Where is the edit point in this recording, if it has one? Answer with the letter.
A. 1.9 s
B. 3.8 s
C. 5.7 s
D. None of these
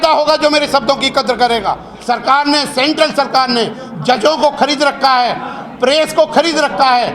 A